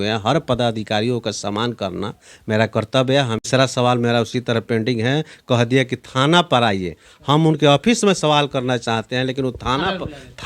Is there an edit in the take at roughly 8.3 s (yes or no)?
no